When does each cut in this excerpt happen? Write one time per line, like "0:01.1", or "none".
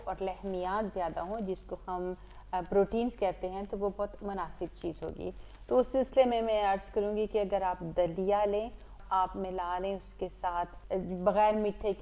0:09.0
0:10.8